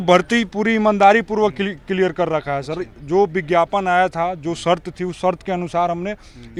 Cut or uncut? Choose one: uncut